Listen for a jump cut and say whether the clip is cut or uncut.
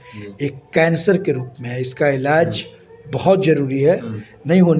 uncut